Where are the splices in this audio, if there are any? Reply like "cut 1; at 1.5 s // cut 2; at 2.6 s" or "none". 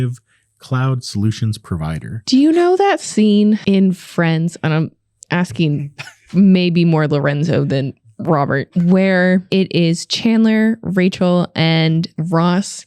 cut 1; at 2.2 s // cut 2; at 8.7 s // cut 3; at 9.5 s